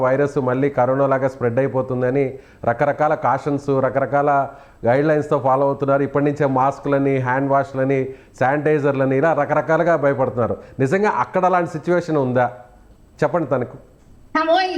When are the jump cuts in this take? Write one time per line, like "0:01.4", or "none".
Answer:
none